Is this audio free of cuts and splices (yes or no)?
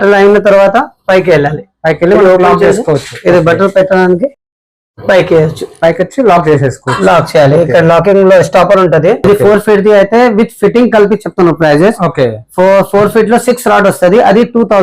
no